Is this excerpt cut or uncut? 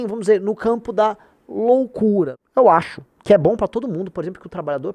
cut